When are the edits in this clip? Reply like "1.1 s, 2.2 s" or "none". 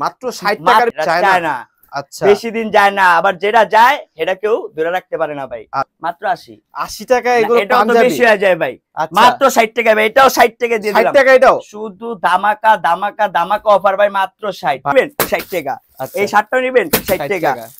0.9 s, 5.9 s, 14.9 s